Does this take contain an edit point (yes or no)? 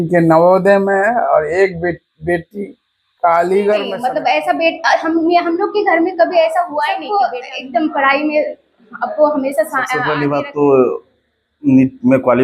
yes